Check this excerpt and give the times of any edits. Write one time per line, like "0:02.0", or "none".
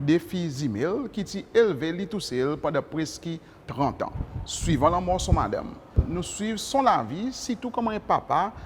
0:06.0